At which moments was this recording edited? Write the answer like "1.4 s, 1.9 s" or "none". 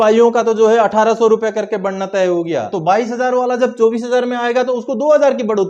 2.7 s